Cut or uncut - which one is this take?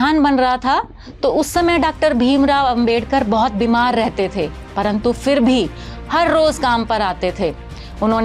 uncut